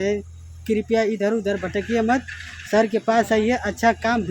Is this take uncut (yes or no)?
yes